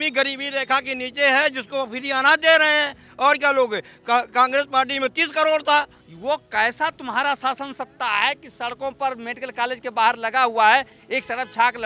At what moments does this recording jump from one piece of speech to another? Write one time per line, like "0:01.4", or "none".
0:06.0